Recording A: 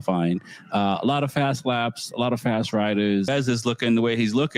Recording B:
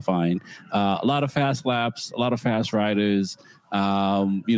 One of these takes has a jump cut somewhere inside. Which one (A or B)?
A